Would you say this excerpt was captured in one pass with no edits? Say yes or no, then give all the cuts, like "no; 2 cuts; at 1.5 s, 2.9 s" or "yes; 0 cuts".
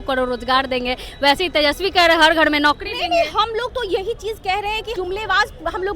no; 1 cut; at 4.9 s